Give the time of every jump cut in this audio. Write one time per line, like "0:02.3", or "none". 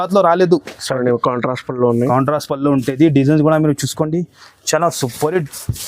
0:01.0